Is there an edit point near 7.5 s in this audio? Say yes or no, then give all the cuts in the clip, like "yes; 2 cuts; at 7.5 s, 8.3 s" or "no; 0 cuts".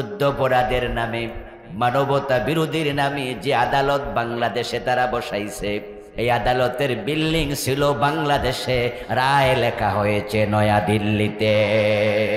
no; 1 cut; at 6.0 s